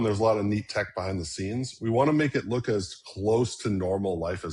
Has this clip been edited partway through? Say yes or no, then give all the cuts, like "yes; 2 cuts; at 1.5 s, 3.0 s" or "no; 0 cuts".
no; 0 cuts